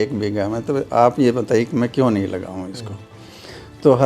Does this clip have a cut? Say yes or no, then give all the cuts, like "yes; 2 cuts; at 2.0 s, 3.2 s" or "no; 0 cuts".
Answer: no; 0 cuts